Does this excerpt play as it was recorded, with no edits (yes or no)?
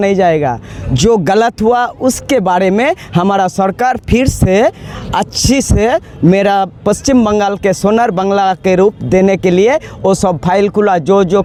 yes